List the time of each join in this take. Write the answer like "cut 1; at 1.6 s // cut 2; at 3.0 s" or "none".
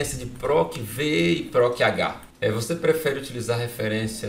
cut 1; at 2.2 s